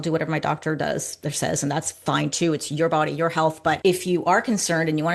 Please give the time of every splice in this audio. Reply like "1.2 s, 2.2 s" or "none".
3.8 s